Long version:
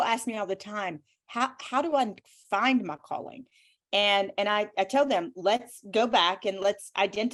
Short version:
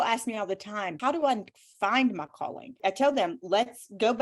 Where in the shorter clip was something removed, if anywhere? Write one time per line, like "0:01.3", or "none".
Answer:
0:00.9
0:02.8